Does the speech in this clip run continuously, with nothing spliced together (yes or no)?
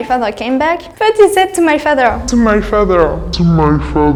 yes